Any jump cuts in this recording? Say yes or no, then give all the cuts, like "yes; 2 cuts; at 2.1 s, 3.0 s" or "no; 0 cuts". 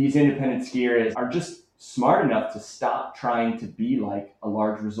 yes; 1 cut; at 1.1 s